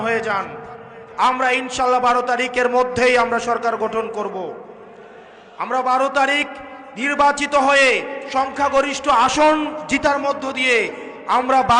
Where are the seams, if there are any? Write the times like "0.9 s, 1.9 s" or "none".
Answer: 1.0 s